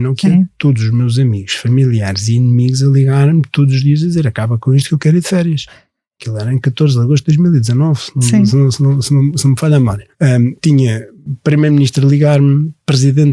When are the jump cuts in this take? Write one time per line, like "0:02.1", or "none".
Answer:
0:10.0